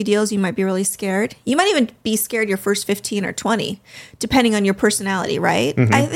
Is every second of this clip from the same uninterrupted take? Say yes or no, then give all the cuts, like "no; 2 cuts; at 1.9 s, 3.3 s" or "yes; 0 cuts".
yes; 0 cuts